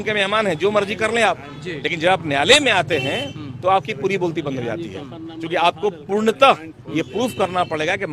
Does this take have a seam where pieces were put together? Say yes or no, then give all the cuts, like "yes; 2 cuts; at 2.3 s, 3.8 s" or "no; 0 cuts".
no; 0 cuts